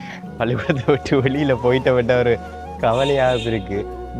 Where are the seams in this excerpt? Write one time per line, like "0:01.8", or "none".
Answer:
none